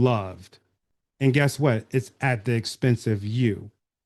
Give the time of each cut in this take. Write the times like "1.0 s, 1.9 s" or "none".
none